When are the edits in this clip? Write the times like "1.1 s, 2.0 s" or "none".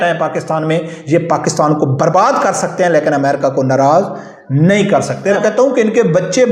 5.4 s